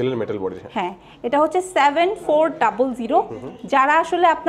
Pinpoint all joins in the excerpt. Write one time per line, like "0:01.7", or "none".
none